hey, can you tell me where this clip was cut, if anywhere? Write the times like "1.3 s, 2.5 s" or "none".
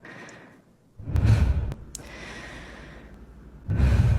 1.7 s

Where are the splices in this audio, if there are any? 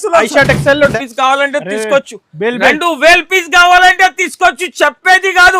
0.9 s

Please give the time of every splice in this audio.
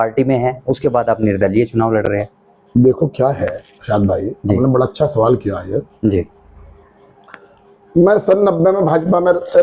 none

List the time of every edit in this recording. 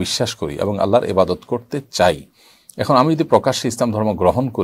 none

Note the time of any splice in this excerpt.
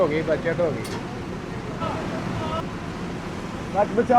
2.6 s

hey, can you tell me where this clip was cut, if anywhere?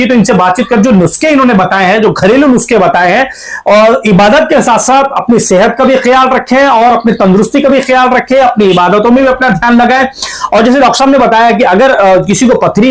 none

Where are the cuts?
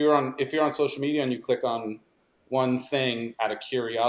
none

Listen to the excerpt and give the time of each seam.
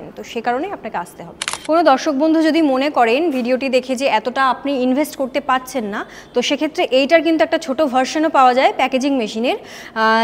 1.5 s

